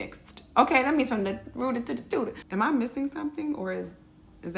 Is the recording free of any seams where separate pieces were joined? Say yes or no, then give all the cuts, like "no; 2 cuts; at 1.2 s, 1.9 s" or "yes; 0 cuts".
no; 1 cut; at 2.4 s